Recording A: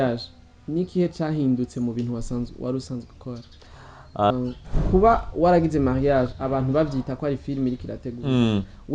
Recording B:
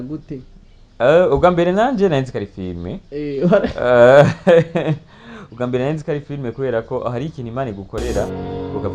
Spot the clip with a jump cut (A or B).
A